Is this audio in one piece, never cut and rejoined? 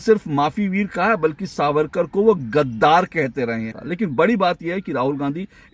no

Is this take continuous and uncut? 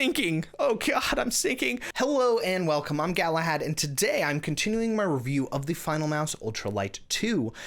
no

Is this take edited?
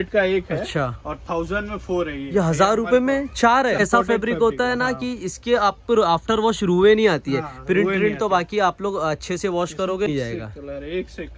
yes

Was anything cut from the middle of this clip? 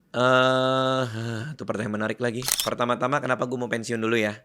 yes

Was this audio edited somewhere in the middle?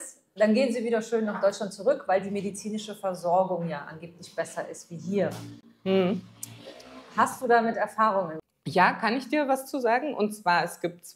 no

